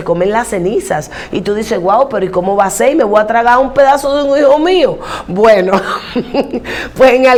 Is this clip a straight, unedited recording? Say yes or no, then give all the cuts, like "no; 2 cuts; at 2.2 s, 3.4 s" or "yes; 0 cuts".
yes; 0 cuts